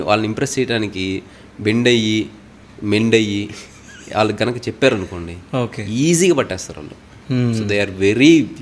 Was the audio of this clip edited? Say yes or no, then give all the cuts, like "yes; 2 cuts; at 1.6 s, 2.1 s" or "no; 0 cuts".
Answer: no; 0 cuts